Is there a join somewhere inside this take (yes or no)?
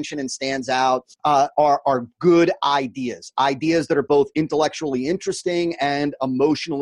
yes